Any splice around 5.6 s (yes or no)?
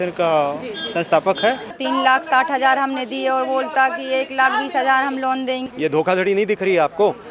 yes